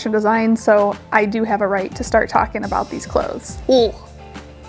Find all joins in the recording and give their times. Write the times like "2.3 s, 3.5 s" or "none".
3.5 s